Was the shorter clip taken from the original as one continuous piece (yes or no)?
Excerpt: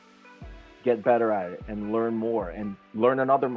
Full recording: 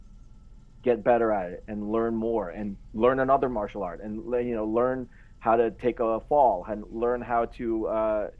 yes